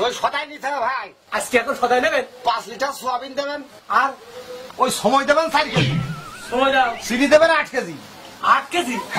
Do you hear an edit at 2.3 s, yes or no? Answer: no